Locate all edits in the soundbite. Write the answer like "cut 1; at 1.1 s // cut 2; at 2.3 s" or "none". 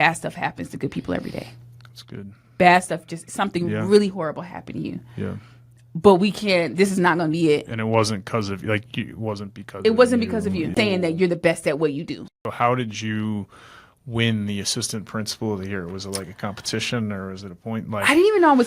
cut 1; at 10.7 s // cut 2; at 12.3 s